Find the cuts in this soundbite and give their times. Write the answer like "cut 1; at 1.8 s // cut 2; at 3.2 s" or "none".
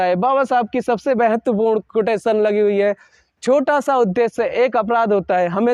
none